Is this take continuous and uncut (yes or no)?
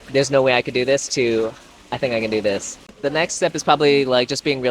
no